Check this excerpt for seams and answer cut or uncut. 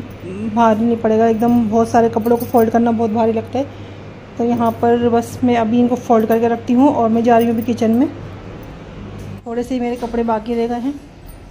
cut